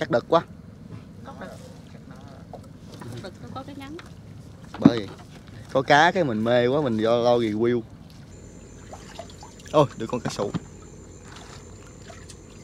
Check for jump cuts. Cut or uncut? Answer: cut